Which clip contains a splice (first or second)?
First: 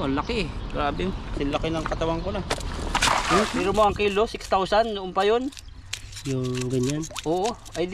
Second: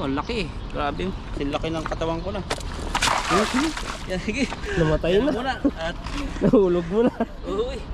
first